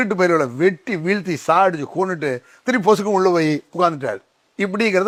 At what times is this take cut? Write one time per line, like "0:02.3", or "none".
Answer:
none